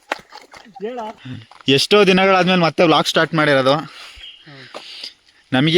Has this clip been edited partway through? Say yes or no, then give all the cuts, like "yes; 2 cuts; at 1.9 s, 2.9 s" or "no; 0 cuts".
yes; 1 cut; at 1.2 s